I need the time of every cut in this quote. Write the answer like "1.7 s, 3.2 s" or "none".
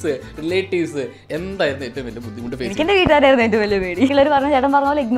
1.2 s, 4.1 s

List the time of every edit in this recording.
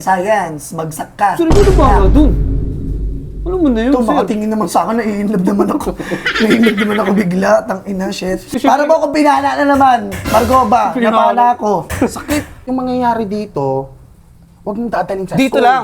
8.5 s, 12.6 s

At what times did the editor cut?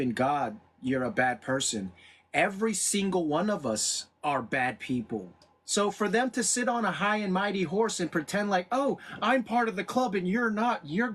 5.3 s

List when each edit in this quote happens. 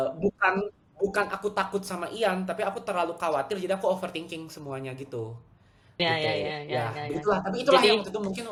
none

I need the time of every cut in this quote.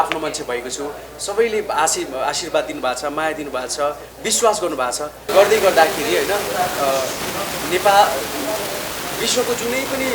5.2 s

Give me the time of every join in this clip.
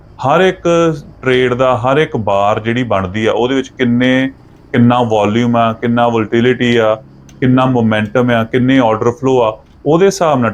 none

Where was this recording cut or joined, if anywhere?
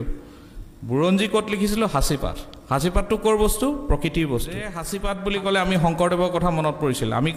4.9 s

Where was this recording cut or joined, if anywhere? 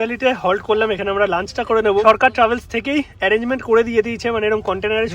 2.0 s

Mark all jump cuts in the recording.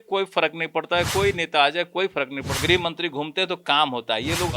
2.6 s

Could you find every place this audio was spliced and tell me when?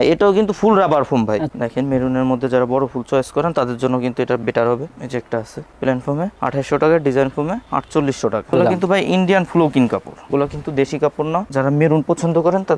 1.5 s, 4.9 s, 8.5 s, 11.5 s

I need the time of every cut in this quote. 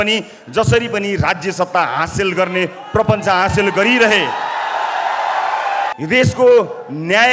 5.9 s

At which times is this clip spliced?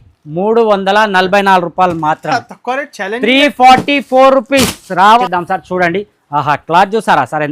5.2 s

